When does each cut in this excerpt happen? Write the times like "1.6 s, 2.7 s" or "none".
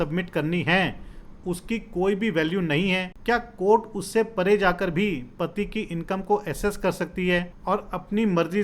3.1 s, 7.5 s